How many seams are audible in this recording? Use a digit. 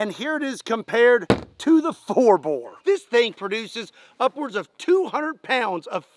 1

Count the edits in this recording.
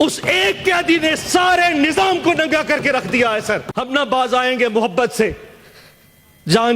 1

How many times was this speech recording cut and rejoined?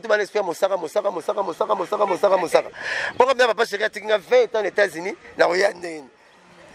0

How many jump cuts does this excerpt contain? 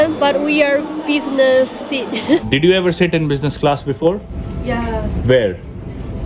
2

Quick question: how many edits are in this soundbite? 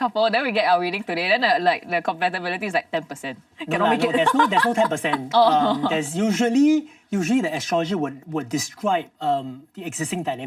0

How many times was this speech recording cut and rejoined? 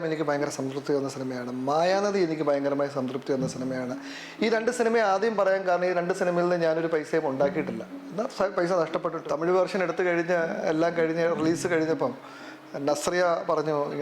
1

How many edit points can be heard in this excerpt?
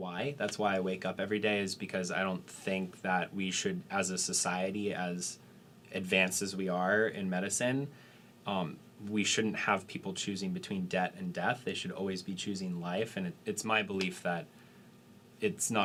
0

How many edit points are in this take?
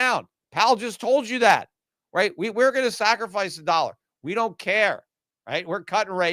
0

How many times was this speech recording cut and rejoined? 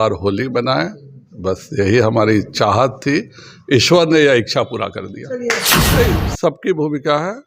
1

